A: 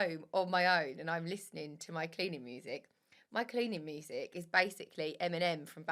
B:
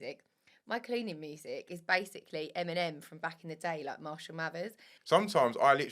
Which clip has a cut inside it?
B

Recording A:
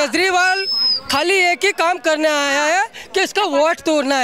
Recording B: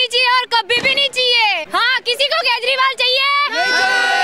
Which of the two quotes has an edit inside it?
B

